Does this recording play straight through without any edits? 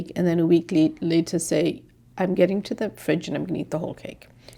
yes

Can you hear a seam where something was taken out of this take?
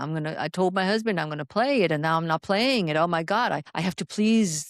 yes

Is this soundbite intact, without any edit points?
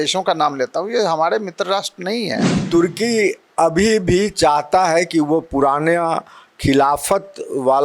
no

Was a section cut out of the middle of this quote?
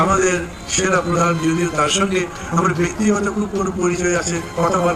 no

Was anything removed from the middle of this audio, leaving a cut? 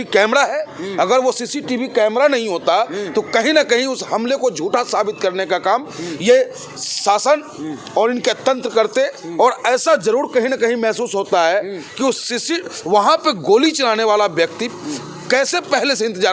no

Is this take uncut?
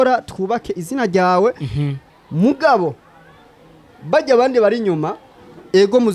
yes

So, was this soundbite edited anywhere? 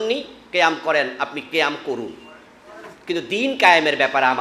no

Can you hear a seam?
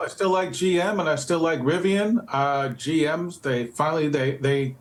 no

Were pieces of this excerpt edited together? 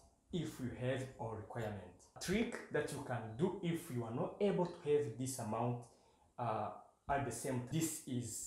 yes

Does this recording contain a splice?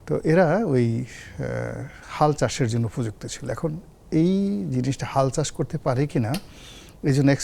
no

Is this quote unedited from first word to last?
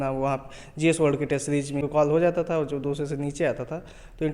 no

